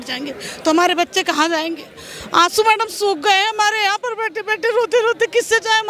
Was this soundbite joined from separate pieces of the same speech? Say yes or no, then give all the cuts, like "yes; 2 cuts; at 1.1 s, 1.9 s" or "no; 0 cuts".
no; 0 cuts